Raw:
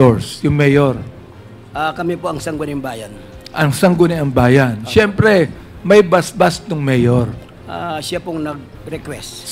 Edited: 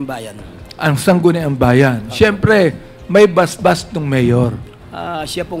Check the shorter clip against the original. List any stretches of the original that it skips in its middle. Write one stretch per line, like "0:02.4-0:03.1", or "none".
none